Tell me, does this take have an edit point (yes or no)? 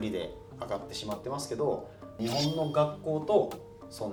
no